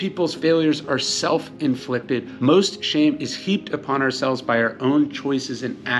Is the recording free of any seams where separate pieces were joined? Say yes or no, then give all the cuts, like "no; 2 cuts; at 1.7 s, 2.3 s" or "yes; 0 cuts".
yes; 0 cuts